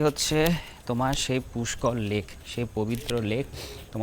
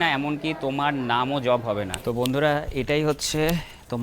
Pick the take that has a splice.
second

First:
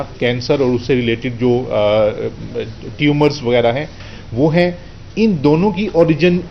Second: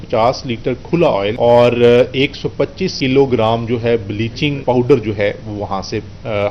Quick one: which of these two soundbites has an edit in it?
second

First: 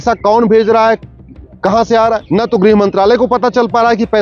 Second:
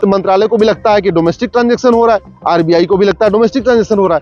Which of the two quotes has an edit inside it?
first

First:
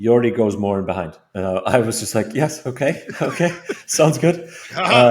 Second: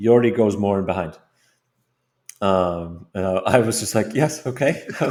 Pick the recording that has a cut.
first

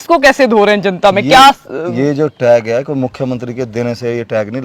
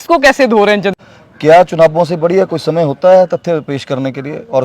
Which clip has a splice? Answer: second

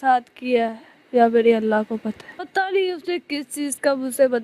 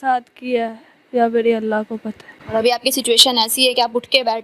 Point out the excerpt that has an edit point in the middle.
first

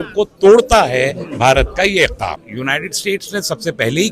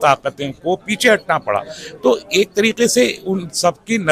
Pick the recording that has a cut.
first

